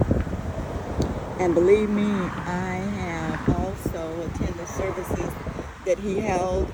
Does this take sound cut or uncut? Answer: uncut